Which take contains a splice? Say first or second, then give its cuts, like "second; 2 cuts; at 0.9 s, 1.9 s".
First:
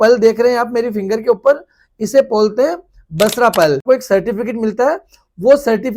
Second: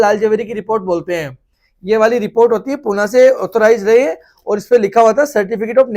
first; 1 cut; at 3.8 s